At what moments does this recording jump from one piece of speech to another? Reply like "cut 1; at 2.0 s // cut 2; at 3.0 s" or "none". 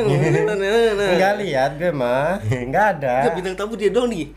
cut 1; at 2.4 s